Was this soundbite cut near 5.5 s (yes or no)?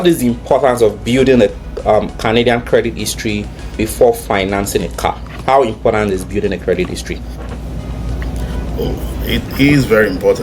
no